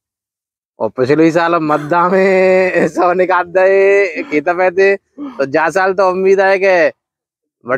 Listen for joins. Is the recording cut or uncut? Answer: uncut